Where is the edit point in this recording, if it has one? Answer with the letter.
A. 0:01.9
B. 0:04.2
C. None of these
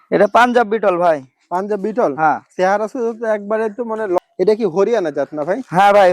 B